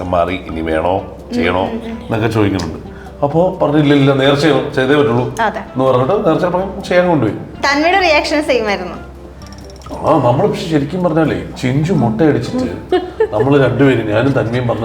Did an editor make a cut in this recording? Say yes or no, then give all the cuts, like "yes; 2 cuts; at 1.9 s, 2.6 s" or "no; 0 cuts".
yes; 2 cuts; at 7.6 s, 11.5 s